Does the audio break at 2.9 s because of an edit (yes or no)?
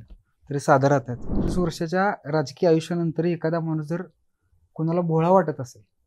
no